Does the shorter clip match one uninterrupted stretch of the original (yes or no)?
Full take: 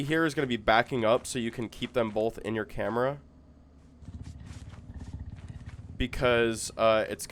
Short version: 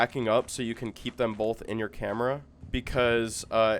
no